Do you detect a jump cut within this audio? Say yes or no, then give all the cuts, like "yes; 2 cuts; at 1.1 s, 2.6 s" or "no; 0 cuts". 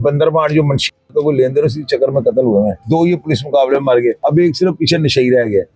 yes; 2 cuts; at 2.8 s, 4.2 s